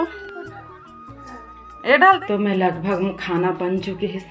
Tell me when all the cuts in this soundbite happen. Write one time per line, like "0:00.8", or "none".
0:02.2